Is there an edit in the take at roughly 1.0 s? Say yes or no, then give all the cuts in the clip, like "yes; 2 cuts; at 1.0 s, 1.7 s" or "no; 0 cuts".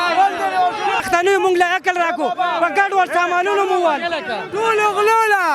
yes; 1 cut; at 1.0 s